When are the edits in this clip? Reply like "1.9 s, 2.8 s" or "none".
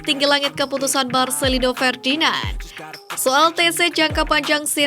3.0 s